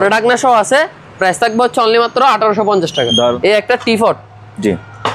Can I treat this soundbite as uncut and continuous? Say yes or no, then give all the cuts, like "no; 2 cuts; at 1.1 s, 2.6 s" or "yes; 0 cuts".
no; 1 cut; at 3.4 s